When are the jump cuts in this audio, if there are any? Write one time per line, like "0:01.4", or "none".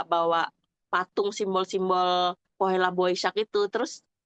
0:02.4